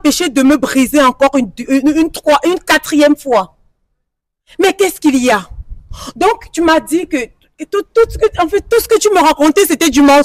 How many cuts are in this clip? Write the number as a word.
zero